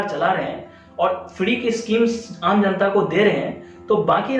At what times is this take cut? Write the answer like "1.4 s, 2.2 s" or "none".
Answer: none